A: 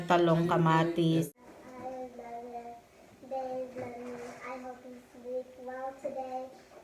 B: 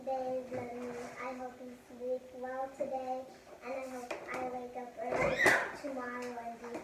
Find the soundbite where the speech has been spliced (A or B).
A